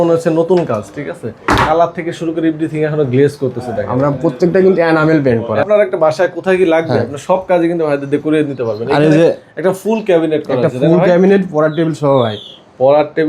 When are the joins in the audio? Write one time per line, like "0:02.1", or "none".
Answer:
0:05.6